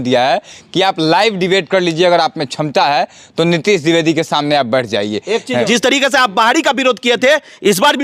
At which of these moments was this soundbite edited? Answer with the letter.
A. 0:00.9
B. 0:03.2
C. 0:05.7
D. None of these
C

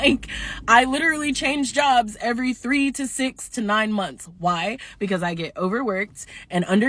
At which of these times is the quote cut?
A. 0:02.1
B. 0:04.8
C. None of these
B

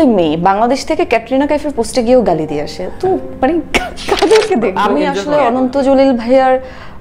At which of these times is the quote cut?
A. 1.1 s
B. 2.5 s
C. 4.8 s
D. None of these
C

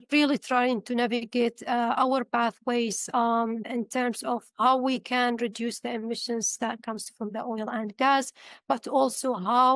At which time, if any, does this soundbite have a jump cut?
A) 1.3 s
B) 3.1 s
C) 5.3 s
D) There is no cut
D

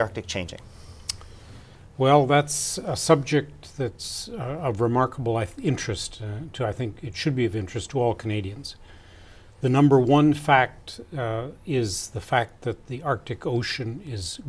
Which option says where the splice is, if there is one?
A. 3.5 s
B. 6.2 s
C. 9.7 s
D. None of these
C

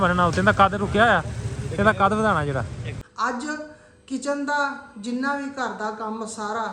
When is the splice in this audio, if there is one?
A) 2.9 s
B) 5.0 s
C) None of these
A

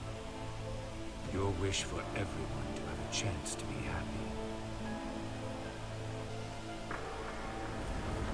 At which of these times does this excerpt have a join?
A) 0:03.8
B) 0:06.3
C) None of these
B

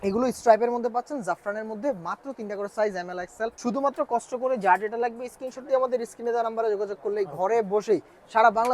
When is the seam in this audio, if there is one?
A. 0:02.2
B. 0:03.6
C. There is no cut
B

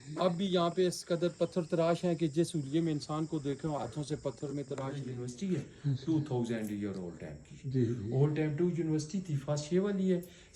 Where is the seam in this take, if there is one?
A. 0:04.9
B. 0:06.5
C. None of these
A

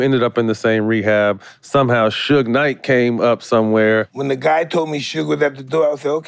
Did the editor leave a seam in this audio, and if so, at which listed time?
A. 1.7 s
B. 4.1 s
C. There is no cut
B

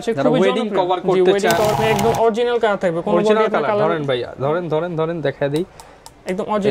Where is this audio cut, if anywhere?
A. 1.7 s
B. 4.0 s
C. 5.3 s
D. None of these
A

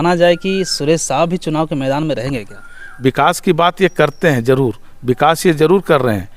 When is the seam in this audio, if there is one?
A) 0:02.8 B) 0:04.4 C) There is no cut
A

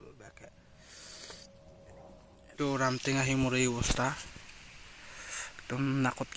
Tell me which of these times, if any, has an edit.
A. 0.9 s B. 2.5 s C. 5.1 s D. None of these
B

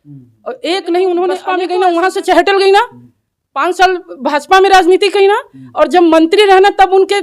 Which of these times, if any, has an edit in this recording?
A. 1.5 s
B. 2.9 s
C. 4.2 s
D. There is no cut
A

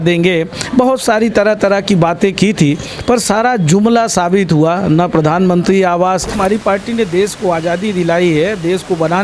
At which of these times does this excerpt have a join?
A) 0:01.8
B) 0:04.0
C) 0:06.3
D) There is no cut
C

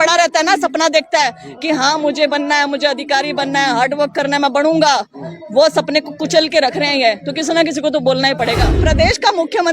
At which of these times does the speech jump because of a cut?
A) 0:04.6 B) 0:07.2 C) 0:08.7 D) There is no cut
C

